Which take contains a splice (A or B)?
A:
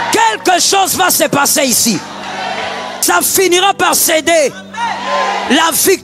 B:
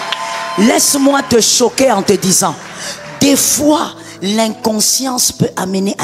A